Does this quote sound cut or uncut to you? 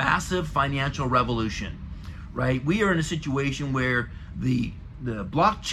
uncut